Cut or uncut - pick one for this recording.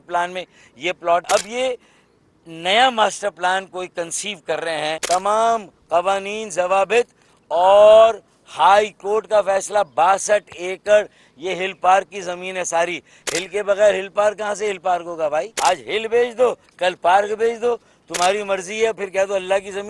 cut